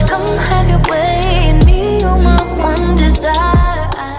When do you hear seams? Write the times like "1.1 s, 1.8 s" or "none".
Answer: none